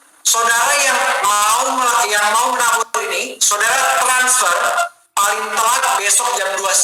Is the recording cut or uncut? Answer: uncut